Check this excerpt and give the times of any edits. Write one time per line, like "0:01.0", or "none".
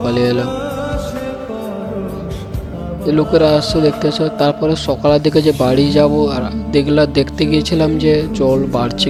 none

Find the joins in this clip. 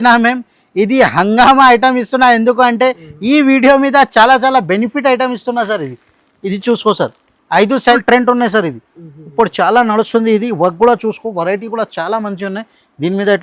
0:08.0

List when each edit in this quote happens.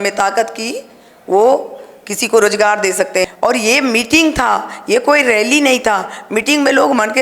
0:03.3

